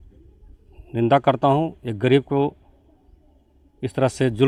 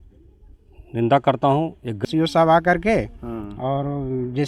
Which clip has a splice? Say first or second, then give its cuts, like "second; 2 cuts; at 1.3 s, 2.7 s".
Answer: second; 1 cut; at 2.0 s